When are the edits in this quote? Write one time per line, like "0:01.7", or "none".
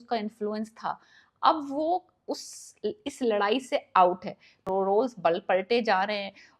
0:04.6